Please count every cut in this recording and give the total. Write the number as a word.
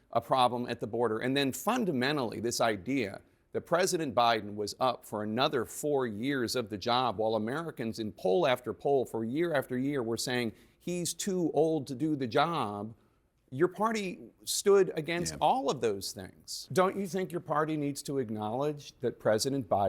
one